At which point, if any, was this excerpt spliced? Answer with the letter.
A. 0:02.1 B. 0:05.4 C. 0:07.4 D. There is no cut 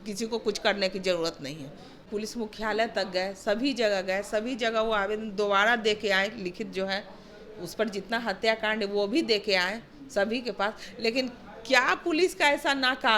A